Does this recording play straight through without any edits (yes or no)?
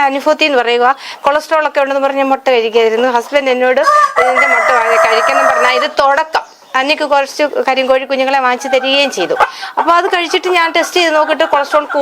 yes